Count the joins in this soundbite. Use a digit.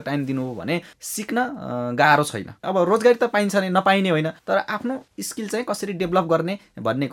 1